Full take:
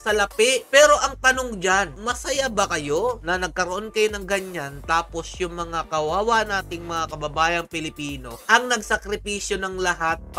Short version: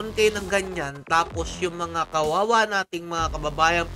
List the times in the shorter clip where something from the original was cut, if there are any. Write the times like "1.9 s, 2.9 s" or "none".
none